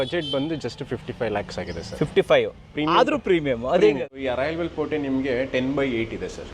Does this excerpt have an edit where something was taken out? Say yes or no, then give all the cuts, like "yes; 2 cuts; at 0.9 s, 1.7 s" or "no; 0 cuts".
yes; 1 cut; at 4.1 s